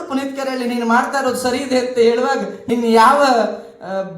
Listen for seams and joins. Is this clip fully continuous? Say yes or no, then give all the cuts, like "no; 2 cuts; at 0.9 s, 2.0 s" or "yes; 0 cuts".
no; 1 cut; at 2.5 s